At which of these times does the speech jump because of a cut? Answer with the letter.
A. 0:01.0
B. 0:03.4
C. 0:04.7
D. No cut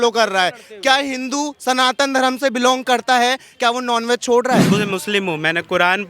C